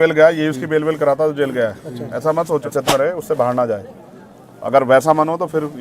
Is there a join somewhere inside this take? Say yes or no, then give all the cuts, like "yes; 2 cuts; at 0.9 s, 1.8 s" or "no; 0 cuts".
yes; 1 cut; at 2.7 s